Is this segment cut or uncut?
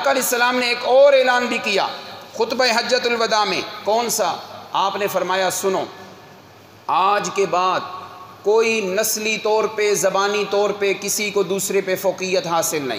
uncut